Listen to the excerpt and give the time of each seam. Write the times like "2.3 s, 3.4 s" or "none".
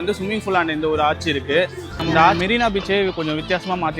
2.4 s